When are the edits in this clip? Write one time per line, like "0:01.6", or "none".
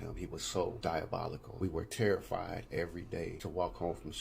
0:01.1
0:03.4